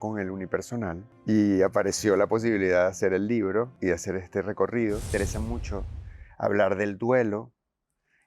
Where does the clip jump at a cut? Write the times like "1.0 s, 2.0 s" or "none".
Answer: 1.1 s, 3.7 s, 5.1 s